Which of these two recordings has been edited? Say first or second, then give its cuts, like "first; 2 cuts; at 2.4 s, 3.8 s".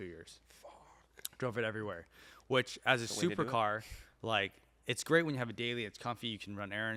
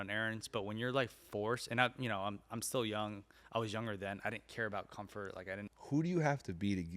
second; 1 cut; at 5.7 s